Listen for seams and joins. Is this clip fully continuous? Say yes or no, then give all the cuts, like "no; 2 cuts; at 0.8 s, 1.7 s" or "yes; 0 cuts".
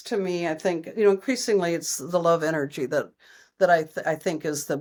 yes; 0 cuts